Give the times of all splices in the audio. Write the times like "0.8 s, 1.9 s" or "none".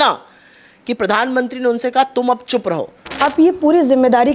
3.2 s